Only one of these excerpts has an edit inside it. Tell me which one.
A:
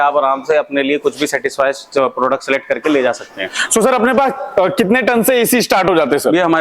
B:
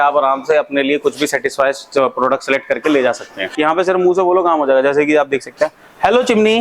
B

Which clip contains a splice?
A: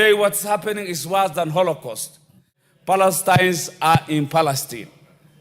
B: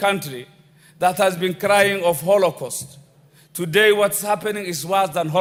A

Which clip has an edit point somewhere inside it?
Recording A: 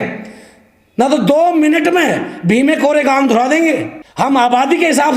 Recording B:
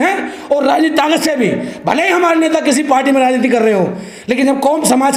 A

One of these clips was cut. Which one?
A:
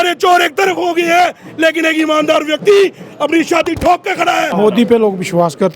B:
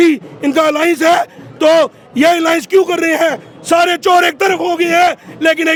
A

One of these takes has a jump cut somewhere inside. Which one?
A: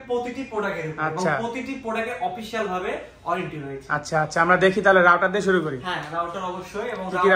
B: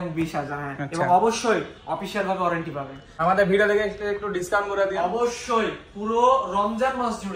B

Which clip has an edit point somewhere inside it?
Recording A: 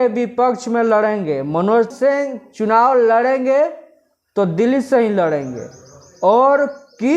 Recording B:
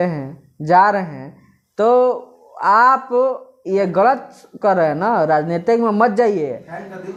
A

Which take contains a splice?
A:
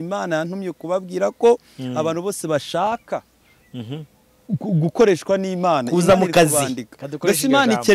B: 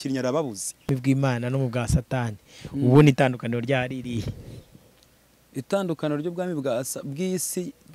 B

